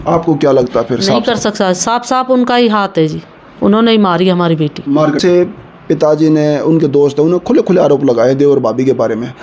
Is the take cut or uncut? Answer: cut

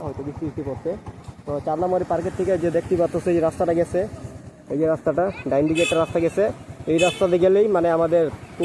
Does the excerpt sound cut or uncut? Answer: uncut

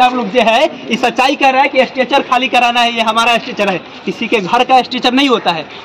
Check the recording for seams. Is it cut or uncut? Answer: uncut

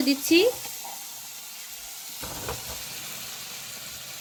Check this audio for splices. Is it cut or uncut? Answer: uncut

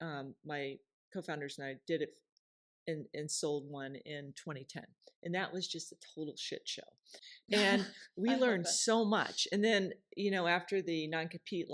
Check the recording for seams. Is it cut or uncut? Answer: uncut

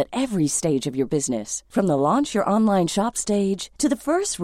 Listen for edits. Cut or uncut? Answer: uncut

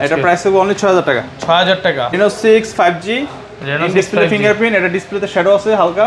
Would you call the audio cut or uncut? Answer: cut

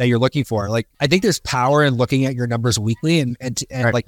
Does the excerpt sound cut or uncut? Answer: cut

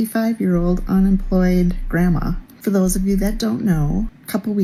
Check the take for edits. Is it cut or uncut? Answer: uncut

